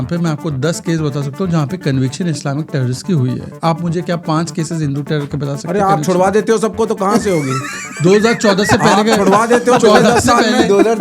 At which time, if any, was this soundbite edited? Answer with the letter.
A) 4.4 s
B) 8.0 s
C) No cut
C